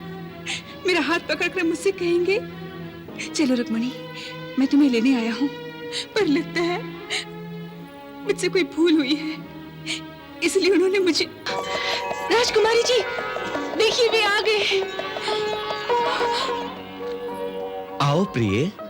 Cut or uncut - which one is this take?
cut